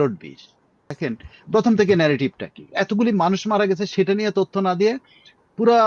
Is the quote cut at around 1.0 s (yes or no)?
yes